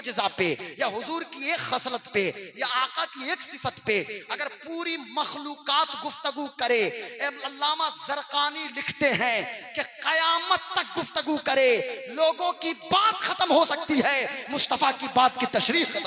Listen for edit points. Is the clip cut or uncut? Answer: uncut